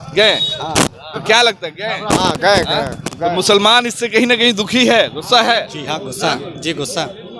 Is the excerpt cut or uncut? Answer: uncut